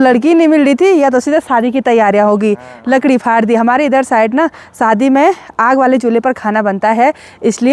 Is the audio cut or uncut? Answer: uncut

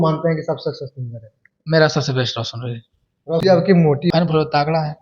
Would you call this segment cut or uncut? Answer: cut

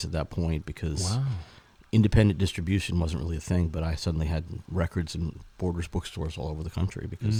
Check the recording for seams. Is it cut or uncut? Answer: uncut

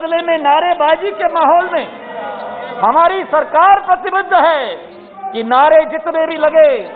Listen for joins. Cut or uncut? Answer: uncut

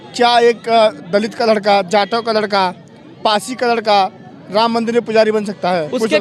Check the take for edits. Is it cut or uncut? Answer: uncut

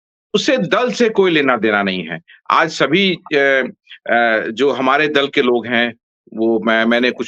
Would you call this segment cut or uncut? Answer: uncut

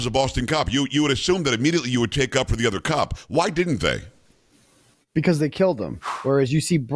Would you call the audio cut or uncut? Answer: cut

